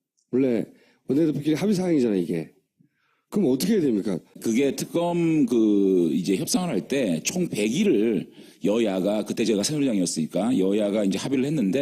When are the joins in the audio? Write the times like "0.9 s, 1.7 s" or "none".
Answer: 7.9 s